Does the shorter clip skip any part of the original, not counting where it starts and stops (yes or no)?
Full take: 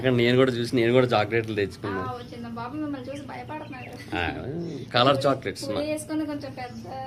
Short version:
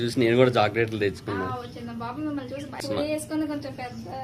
yes